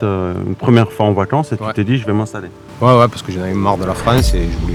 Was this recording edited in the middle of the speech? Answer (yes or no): no